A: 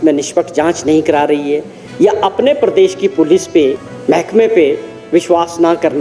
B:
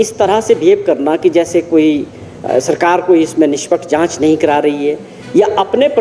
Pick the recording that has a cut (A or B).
A